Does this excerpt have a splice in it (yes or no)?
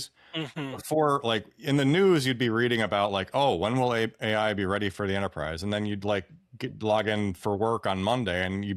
no